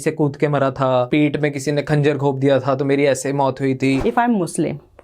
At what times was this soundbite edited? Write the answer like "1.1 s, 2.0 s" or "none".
1.1 s, 4.0 s